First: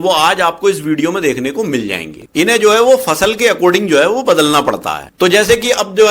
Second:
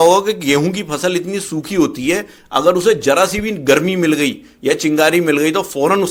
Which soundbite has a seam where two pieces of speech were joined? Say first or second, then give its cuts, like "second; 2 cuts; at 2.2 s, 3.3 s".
first; 1 cut; at 2.2 s